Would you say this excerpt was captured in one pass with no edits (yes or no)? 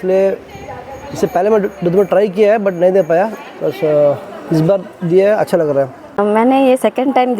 no